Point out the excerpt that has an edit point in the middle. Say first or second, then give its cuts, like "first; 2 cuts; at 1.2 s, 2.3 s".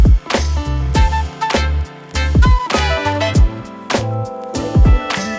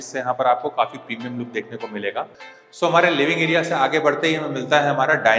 second; 1 cut; at 2.4 s